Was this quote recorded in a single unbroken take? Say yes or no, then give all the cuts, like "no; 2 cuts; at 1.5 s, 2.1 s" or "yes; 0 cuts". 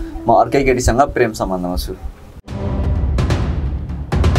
yes; 0 cuts